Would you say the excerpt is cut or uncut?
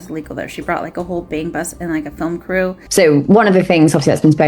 cut